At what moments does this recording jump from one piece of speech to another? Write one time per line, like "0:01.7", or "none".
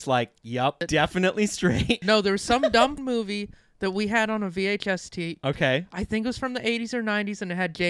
0:00.8
0:02.0
0:03.0